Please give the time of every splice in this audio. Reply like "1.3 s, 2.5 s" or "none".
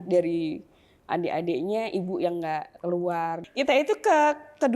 3.4 s